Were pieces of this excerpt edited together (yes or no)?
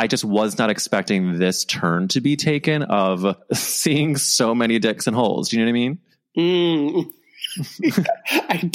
yes